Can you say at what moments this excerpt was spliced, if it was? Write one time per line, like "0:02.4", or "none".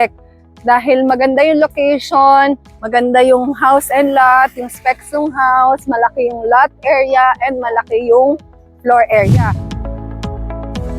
0:09.3